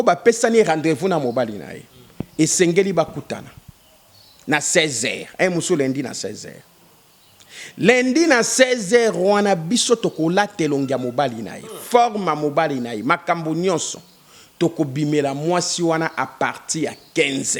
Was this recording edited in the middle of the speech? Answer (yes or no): no